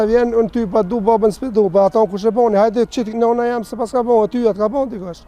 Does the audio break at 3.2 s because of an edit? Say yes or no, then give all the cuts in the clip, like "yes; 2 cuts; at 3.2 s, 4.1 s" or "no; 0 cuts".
no; 0 cuts